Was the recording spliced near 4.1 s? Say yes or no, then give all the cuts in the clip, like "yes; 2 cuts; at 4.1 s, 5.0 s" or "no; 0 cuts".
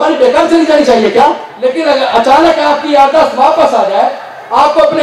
no; 1 cut; at 1.5 s